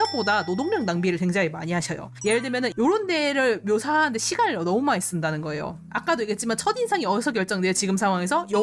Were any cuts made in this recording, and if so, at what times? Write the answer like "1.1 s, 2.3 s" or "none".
none